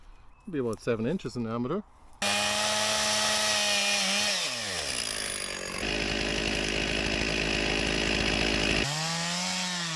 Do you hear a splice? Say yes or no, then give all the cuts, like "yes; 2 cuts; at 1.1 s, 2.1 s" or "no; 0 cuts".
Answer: yes; 3 cuts; at 2.2 s, 5.8 s, 8.8 s